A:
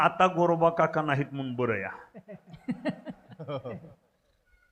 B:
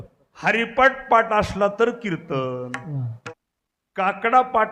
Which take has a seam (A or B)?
B